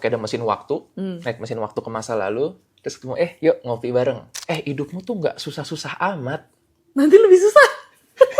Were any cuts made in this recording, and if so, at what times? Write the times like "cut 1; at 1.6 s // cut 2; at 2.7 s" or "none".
cut 1; at 4.3 s